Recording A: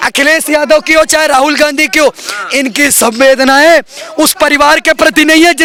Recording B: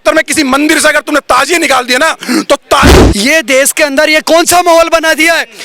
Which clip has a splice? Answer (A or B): B